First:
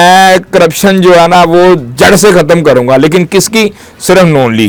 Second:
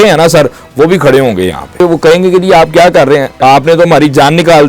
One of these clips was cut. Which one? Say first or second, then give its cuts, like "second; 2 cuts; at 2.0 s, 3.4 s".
second; 2 cuts; at 1.8 s, 3.3 s